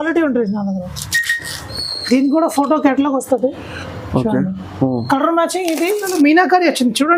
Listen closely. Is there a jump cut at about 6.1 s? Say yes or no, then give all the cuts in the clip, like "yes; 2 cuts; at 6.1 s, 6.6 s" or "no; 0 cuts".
yes; 1 cut; at 6.1 s